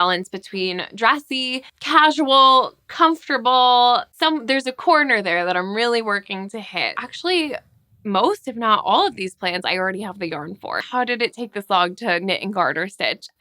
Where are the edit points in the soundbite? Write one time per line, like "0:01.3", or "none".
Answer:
0:04.1
0:07.1
0:10.8